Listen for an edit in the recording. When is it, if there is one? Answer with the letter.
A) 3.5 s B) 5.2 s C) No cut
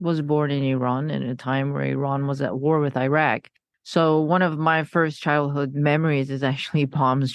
C